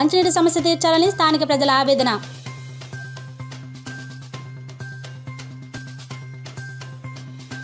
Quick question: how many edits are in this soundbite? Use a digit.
1